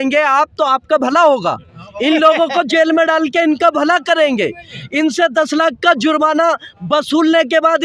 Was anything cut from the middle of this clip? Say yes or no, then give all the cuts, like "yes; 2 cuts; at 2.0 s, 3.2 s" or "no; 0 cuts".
no; 0 cuts